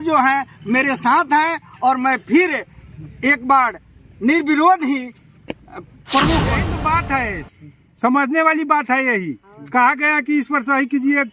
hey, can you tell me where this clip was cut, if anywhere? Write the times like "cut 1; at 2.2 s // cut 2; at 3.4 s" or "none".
cut 1; at 6.7 s